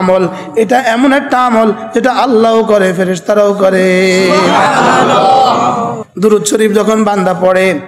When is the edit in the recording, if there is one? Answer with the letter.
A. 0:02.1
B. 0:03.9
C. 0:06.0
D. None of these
C